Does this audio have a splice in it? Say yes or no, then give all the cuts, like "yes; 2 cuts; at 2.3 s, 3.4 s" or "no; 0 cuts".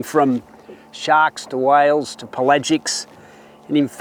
no; 0 cuts